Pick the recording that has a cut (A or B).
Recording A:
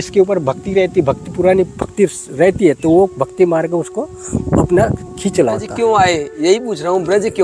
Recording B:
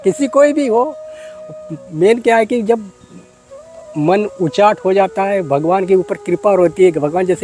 A